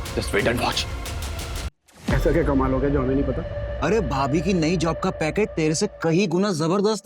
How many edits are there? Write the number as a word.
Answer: one